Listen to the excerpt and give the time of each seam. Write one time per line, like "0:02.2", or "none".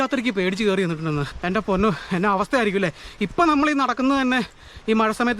0:01.3